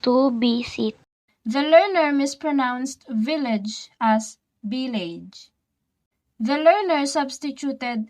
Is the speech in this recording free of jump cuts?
yes; 0 cuts

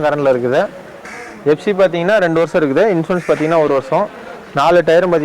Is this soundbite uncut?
no; 1 cut; at 1.1 s

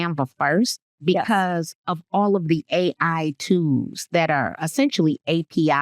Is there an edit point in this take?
no; 0 cuts

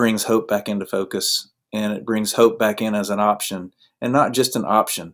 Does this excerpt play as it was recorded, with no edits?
yes; 0 cuts

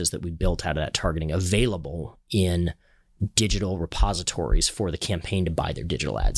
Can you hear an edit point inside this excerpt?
no; 0 cuts

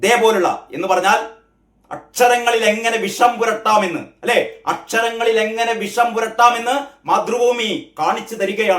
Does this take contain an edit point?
no; 0 cuts

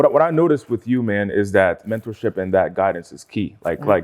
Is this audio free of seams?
no; 1 cut; at 1.9 s

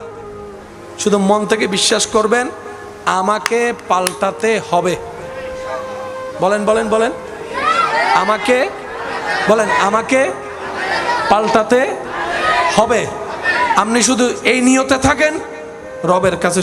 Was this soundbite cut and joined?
no; 0 cuts

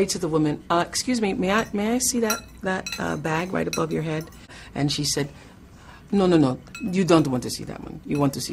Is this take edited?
yes; 1 cut; at 4.6 s

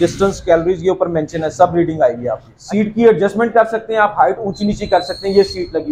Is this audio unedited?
no; 1 cut; at 2.5 s

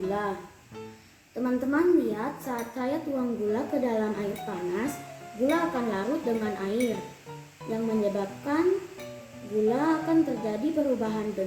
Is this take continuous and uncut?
yes; 0 cuts

